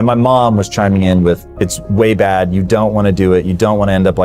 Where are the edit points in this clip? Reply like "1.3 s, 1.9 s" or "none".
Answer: 1.5 s